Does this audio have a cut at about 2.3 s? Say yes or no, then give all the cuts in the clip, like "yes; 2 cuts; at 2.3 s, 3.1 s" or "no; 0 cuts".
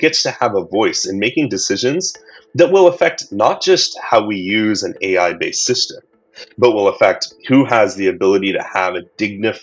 no; 0 cuts